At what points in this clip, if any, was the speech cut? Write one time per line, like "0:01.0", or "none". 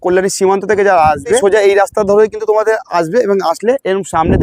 0:01.4

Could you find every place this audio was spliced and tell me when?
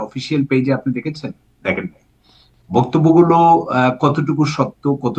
none

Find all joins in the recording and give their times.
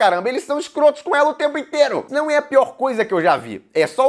0:02.1

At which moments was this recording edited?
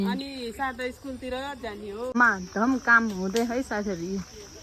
0:02.2

